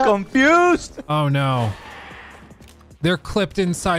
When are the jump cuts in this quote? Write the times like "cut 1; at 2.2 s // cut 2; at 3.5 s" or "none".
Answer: cut 1; at 1.0 s